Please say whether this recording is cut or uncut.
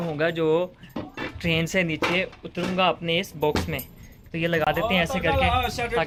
uncut